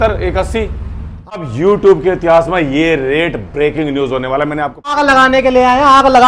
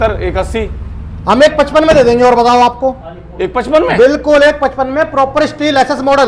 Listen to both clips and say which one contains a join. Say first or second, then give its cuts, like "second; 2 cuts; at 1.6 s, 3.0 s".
first; 2 cuts; at 1.4 s, 4.9 s